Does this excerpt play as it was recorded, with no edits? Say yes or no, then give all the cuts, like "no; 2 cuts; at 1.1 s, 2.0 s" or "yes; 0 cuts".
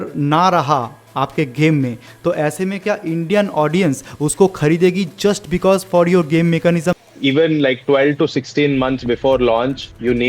no; 1 cut; at 7.0 s